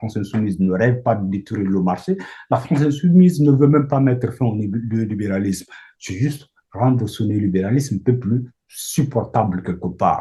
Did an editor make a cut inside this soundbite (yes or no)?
no